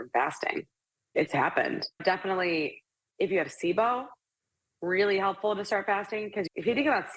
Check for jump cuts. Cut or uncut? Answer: cut